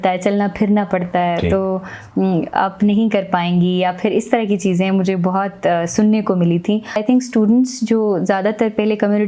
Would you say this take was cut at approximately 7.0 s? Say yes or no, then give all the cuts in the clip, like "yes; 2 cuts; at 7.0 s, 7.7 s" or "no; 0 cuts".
yes; 1 cut; at 7.0 s